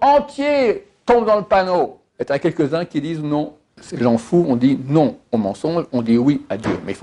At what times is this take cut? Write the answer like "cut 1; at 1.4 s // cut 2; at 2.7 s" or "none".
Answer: cut 1; at 2.1 s // cut 2; at 3.8 s